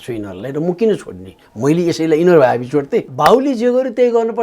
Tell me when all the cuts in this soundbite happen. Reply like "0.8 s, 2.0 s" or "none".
3.1 s